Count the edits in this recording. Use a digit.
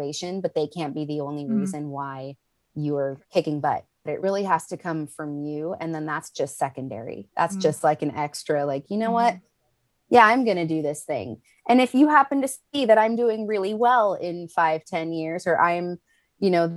2